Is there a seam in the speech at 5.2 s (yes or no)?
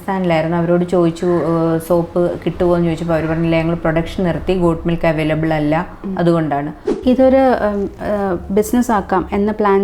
no